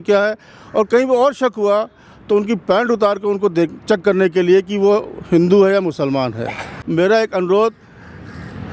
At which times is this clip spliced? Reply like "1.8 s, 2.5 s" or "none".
6.8 s